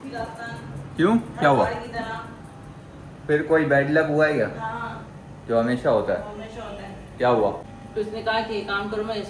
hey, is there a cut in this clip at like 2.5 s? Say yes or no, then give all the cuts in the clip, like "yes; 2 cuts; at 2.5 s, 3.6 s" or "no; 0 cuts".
no; 1 cut; at 7.7 s